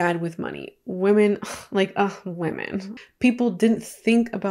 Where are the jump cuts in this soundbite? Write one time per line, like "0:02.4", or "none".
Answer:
0:03.1